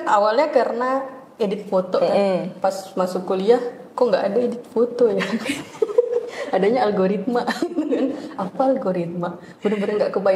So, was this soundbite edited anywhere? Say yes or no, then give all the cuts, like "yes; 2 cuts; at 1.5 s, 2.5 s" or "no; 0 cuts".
no; 0 cuts